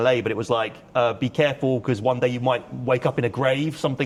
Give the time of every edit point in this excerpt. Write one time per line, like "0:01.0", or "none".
none